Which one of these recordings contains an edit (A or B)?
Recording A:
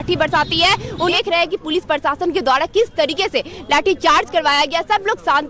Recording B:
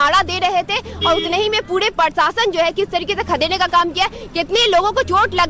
A